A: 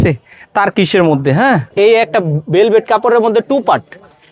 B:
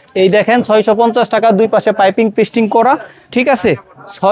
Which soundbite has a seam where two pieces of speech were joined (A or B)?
A